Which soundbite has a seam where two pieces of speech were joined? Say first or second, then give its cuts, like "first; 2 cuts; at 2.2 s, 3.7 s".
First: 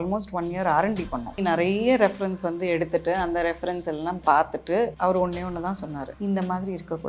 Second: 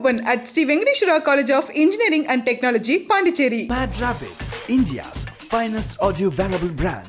first; 3 cuts; at 1.4 s, 4.9 s, 6.1 s